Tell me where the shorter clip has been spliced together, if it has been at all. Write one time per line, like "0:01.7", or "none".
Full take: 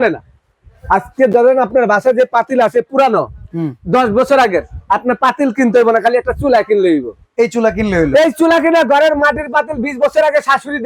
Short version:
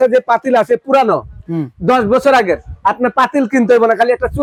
none